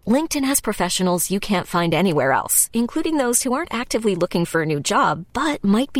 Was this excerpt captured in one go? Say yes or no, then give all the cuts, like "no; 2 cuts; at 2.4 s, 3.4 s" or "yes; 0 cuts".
yes; 0 cuts